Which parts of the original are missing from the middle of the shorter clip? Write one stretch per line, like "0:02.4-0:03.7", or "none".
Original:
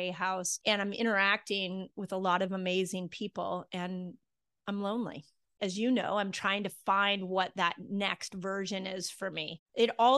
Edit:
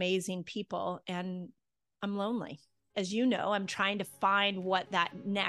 none